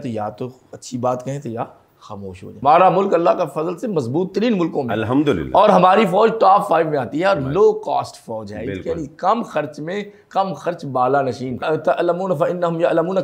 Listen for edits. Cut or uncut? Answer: cut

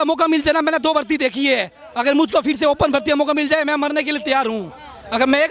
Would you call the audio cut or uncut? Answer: uncut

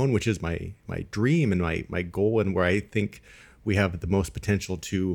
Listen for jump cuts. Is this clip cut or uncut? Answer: uncut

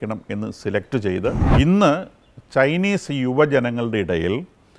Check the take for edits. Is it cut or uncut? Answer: cut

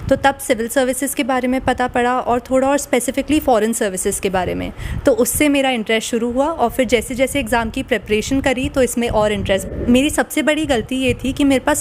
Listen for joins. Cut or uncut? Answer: cut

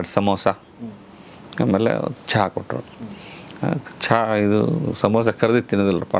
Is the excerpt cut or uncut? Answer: uncut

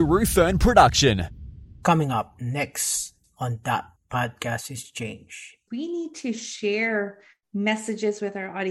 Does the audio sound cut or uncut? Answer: cut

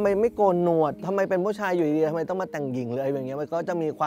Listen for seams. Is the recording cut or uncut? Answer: uncut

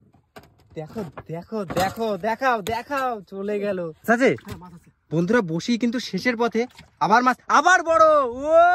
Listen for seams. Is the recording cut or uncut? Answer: cut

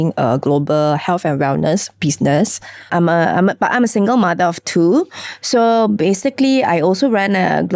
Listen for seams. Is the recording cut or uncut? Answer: cut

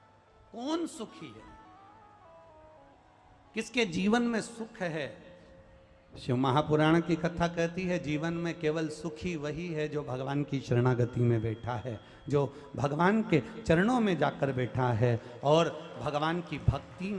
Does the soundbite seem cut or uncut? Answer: uncut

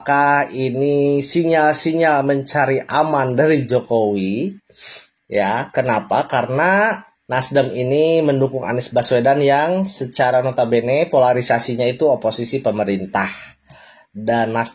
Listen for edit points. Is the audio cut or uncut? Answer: uncut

